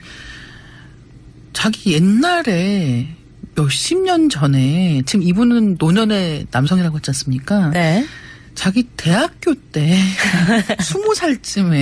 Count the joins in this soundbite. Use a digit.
0